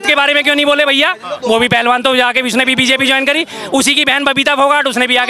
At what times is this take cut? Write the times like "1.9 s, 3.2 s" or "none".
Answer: none